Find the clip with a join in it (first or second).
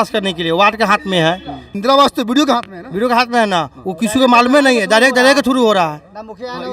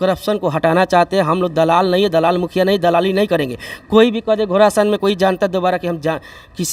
first